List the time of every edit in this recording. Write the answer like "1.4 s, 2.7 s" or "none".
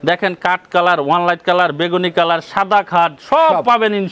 none